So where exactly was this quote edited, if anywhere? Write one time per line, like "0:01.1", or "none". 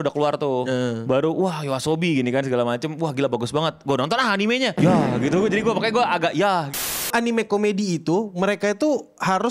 0:04.7
0:07.0